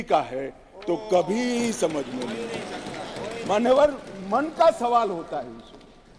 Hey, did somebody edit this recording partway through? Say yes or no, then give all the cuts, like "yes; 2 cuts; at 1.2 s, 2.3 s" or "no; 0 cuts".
yes; 1 cut; at 5.0 s